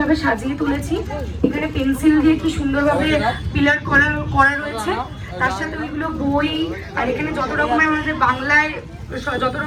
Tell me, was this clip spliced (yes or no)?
no